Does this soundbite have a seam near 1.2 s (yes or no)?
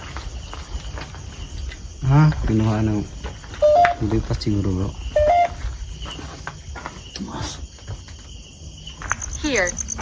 no